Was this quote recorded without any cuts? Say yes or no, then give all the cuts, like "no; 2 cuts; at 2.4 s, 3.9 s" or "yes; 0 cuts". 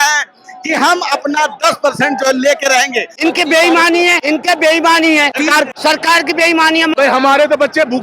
no; 4 cuts; at 3.1 s, 4.2 s, 5.6 s, 6.9 s